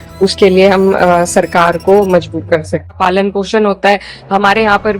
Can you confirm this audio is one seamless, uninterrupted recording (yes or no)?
no